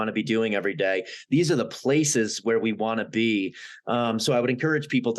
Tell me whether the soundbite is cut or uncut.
uncut